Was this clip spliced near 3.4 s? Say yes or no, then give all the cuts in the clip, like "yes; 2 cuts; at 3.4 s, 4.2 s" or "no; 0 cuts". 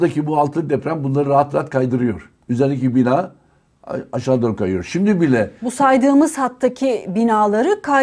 no; 0 cuts